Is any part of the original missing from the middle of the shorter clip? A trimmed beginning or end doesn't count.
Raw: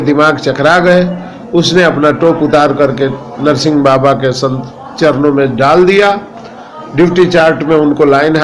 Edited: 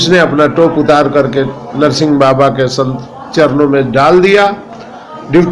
no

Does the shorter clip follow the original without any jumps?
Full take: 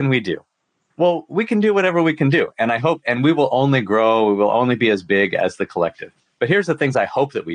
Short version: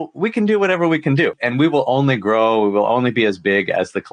no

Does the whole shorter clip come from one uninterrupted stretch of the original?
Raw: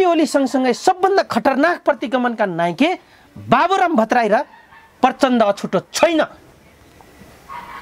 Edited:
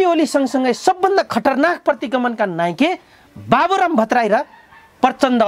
yes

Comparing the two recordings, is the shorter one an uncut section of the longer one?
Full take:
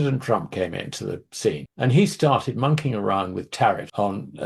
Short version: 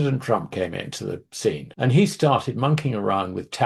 yes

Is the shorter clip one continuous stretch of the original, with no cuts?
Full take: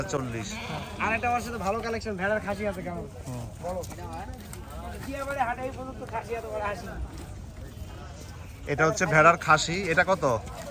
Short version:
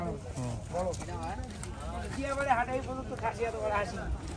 yes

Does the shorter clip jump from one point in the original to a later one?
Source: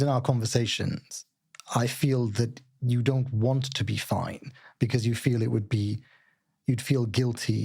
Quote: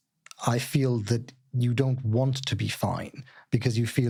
no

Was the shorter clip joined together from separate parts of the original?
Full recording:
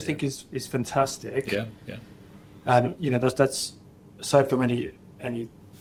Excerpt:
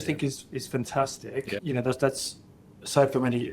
yes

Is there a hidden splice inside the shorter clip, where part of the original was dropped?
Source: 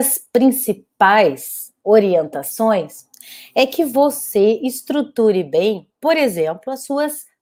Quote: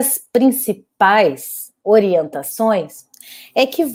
no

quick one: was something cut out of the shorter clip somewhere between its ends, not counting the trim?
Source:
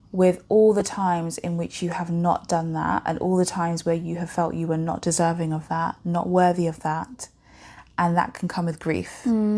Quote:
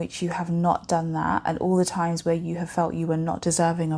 no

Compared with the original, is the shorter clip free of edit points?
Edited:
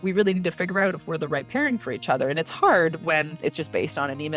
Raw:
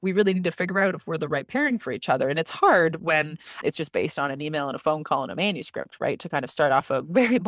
no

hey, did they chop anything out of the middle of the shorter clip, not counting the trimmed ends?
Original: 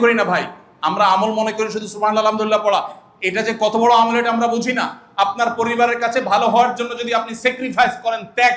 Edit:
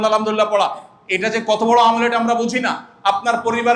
no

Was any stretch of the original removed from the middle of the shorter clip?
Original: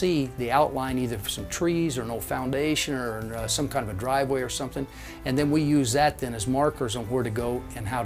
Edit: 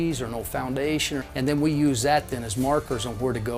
yes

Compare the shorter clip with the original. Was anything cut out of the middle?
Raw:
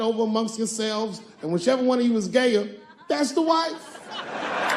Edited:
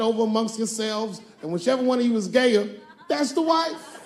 no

